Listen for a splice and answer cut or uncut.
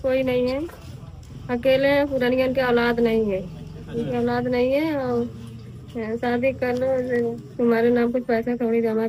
uncut